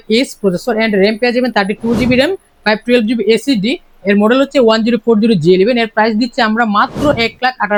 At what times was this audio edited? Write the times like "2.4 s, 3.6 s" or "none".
none